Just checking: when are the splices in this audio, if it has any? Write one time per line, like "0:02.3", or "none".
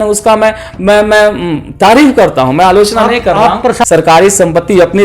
0:03.8